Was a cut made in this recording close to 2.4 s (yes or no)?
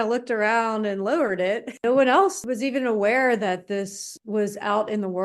yes